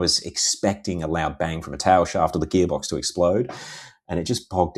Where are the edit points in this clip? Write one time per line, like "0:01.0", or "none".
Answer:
none